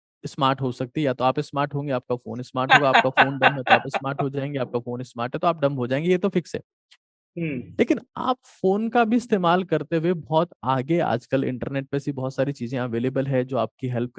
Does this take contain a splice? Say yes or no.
no